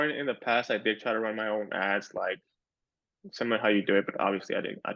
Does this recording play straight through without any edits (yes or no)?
yes